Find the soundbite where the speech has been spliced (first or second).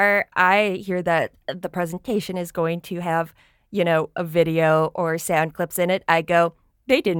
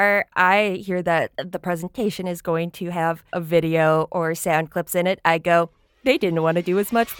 second